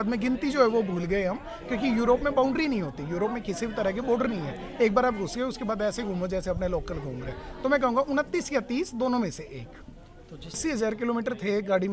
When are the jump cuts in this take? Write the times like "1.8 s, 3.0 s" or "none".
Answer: 10.6 s